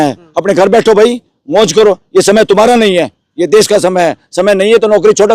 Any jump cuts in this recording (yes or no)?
no